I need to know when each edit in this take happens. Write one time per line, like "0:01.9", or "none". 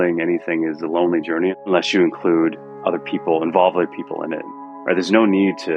0:04.4